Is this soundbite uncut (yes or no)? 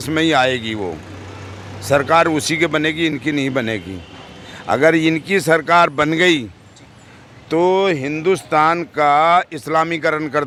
yes